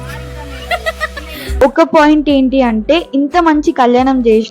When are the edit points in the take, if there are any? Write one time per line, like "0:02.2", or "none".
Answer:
0:01.6